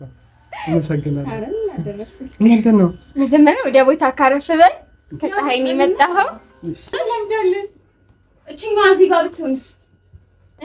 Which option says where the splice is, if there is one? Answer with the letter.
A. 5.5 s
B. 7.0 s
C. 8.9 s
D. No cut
B